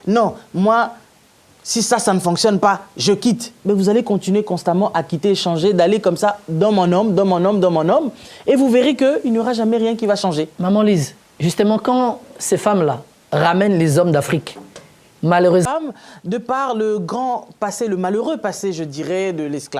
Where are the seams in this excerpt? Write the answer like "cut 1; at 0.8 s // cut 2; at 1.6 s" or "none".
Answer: cut 1; at 15.7 s